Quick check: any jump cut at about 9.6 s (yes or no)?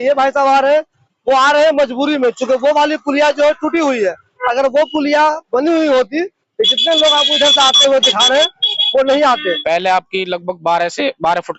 yes